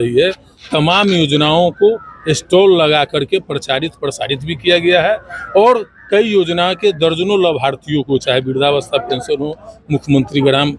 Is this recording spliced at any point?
no; 0 cuts

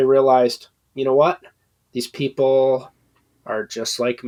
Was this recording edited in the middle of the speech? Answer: no; 0 cuts

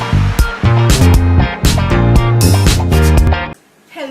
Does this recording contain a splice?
yes; 2 cuts; at 1.0 s, 3.3 s

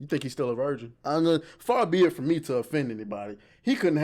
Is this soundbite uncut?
no; 1 cut; at 0.9 s

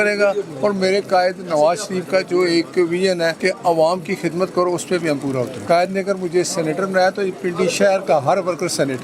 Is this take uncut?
no; 2 cuts; at 3.4 s, 5.6 s

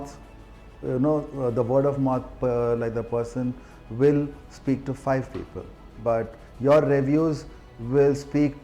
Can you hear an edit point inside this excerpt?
no; 0 cuts

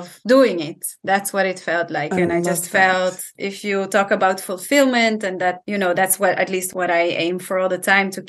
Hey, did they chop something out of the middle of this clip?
yes; 2 cuts; at 3.3 s, 6.7 s

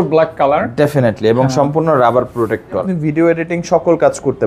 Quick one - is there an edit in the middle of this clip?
yes; 1 cut; at 2.9 s

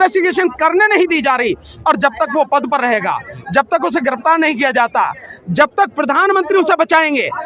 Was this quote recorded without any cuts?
yes; 0 cuts

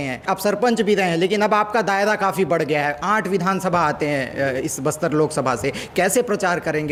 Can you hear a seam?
no; 0 cuts

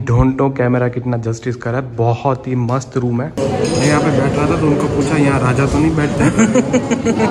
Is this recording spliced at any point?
yes; 1 cut; at 3.4 s

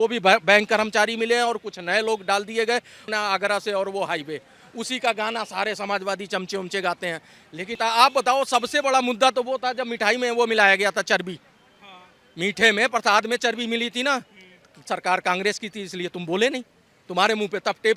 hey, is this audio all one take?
no; 2 cuts; at 3.1 s, 7.7 s

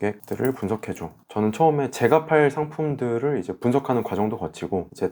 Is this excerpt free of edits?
no; 1 cut; at 1.1 s

